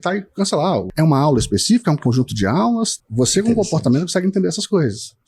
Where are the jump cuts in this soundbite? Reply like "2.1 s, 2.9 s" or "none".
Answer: 0.9 s, 3.0 s